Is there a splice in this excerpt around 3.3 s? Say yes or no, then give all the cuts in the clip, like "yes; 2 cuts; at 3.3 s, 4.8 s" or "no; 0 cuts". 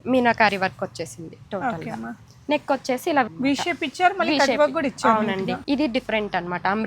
yes; 2 cuts; at 3.3 s, 5.6 s